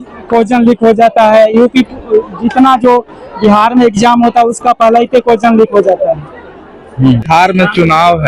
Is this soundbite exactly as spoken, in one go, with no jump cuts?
no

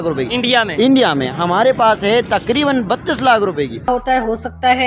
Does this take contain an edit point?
yes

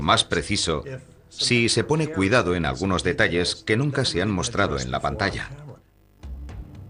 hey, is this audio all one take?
no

